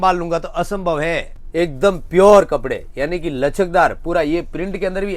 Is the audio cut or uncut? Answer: cut